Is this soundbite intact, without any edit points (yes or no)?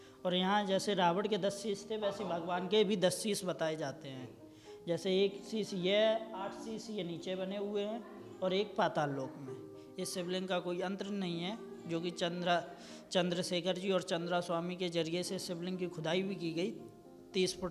yes